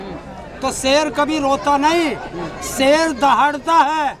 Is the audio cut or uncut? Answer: uncut